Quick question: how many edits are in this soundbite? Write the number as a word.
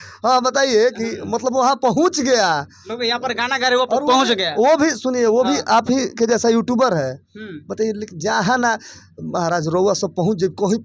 zero